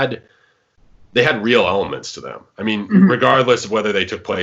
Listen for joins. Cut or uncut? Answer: uncut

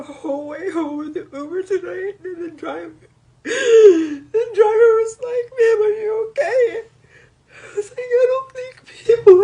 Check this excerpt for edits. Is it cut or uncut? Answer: uncut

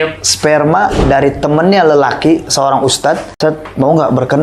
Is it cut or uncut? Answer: cut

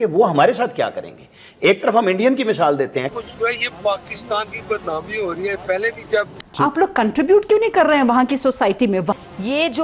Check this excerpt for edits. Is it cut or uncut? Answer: cut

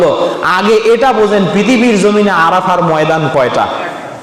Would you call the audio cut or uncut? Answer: uncut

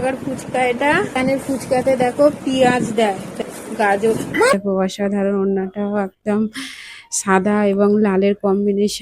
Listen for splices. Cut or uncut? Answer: cut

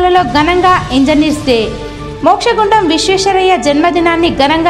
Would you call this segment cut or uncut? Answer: uncut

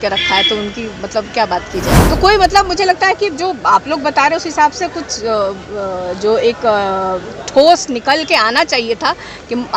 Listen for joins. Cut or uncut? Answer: cut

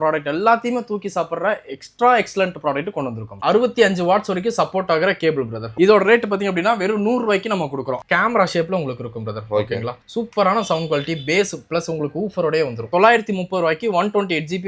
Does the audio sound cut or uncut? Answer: cut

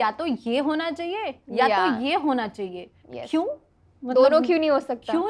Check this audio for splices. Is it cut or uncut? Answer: uncut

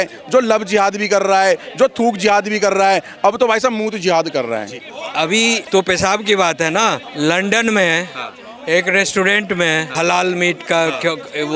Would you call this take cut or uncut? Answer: cut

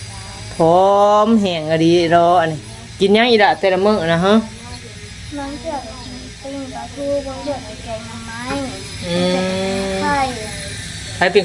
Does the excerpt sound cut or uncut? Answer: uncut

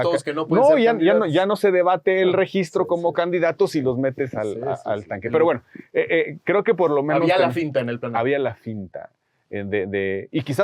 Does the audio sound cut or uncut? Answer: uncut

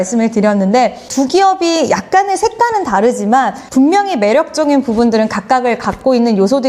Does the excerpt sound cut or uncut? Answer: uncut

